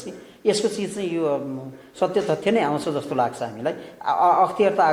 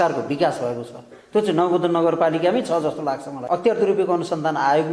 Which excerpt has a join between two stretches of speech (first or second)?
second